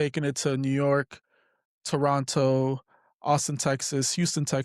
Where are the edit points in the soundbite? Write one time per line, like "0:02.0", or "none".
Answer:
none